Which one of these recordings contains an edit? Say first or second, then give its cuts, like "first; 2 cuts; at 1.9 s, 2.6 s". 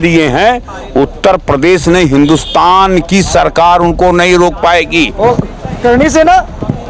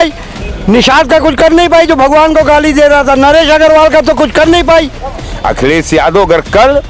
second; 1 cut; at 4.9 s